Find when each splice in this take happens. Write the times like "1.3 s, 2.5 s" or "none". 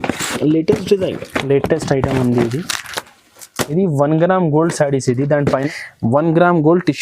5.6 s